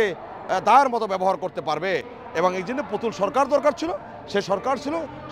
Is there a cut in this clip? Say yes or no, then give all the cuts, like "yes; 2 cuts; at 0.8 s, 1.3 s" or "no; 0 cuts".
no; 0 cuts